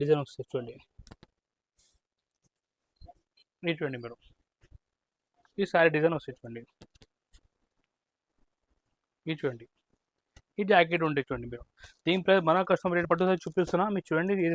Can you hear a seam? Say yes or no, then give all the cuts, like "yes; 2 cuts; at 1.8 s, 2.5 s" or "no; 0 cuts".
yes; 1 cut; at 13.0 s